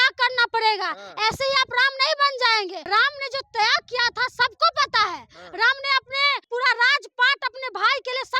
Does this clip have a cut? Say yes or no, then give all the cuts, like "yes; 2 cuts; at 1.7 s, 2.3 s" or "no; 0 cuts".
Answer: yes; 2 cuts; at 2.8 s, 6.4 s